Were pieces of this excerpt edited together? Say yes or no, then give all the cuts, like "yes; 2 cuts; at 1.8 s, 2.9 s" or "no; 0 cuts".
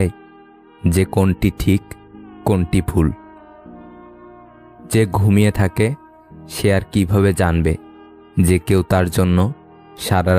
yes; 2 cuts; at 3.1 s, 4.9 s